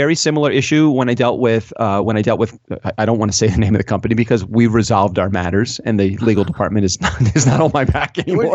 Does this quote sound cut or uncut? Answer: uncut